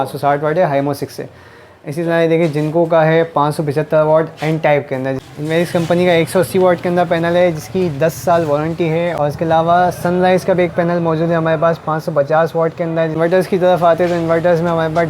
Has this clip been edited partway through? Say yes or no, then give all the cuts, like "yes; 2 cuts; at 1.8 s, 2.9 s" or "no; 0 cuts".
yes; 3 cuts; at 5.2 s, 9.1 s, 13.2 s